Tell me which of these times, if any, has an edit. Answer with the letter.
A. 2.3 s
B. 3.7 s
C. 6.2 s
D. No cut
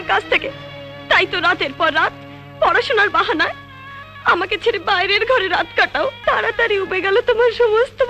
C